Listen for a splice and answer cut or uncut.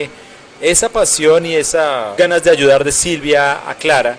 cut